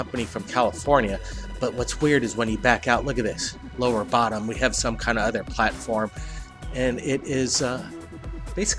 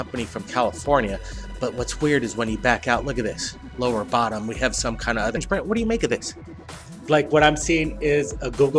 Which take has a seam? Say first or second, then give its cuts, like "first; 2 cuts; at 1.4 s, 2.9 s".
first; 1 cut; at 5.4 s